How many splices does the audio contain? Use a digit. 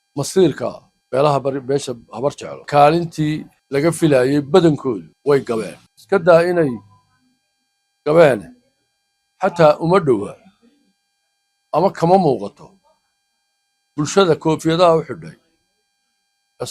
1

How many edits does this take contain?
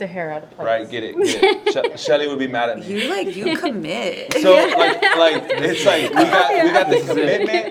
0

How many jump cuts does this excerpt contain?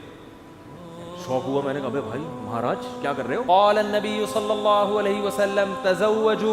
1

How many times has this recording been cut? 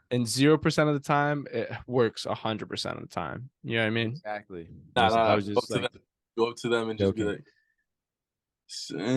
1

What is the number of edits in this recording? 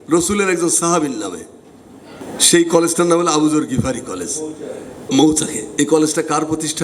1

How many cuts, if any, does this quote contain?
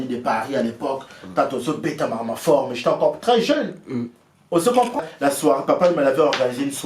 1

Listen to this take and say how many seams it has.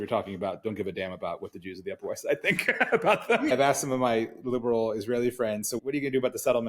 2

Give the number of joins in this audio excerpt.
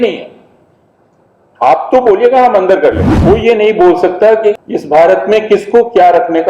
2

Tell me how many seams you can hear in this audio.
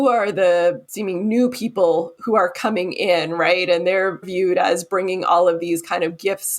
2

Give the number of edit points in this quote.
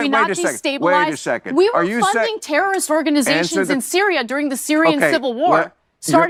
0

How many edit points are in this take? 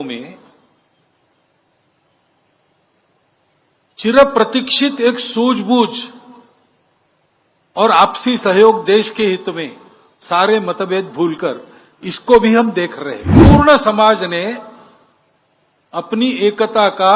1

